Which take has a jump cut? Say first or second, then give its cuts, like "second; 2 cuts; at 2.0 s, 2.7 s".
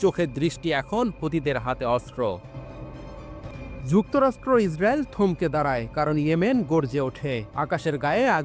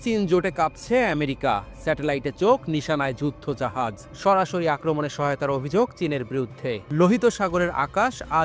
first; 1 cut; at 3.5 s